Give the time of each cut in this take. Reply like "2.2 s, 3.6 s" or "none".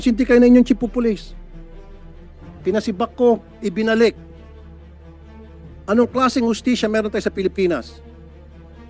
none